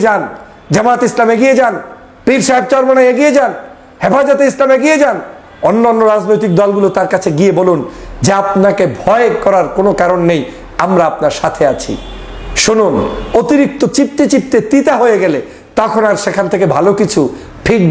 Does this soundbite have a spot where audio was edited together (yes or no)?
no